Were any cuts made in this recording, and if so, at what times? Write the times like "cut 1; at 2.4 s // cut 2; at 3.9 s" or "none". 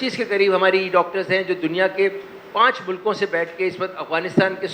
none